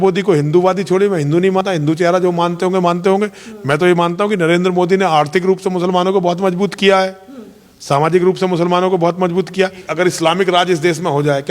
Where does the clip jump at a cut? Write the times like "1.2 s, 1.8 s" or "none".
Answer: 1.6 s, 9.9 s